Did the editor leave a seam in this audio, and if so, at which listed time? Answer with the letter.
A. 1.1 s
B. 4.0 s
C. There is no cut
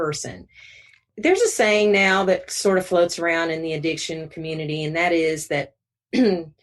A